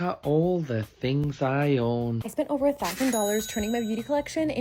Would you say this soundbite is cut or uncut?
cut